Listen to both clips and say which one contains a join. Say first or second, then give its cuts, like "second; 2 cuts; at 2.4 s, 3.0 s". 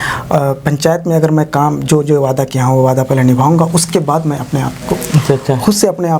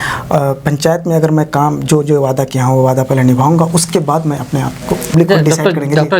second; 1 cut; at 5.1 s